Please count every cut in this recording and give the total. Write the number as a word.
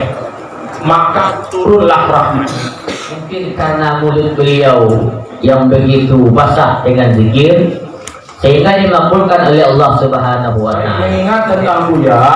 two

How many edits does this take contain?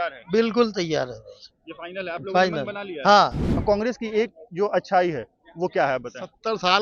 one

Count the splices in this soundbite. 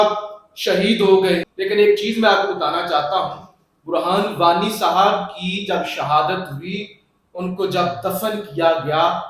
one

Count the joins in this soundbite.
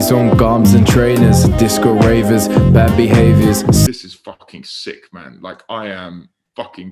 one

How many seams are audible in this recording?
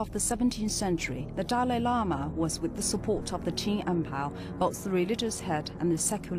one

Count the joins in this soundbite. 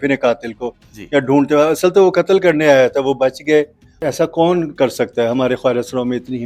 one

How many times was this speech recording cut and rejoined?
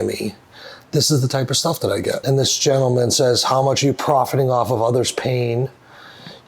one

